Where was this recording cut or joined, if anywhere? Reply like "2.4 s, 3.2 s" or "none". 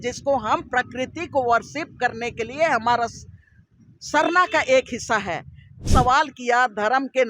5.9 s